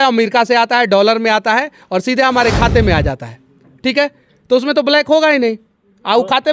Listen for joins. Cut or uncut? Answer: uncut